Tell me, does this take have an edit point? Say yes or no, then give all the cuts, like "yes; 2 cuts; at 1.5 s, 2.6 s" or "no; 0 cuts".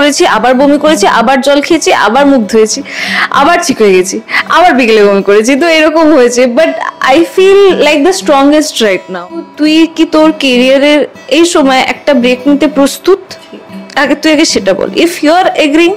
yes; 1 cut; at 9.5 s